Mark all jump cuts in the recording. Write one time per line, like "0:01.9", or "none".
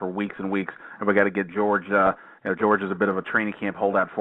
none